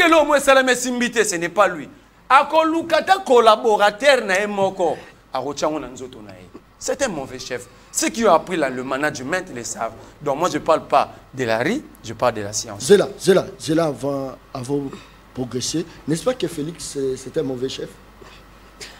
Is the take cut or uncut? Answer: uncut